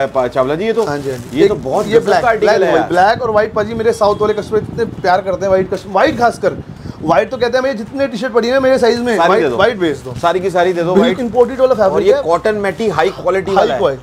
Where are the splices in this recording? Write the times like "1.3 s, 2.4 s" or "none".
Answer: 11.1 s